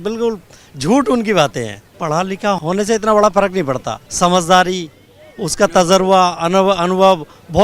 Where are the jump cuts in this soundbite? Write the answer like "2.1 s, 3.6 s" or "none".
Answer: 1.9 s, 2.6 s, 4.0 s